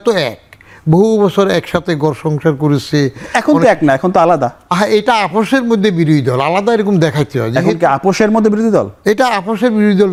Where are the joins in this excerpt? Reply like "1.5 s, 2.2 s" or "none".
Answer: none